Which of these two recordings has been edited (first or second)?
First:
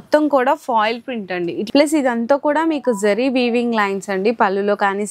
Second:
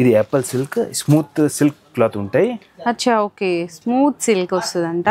first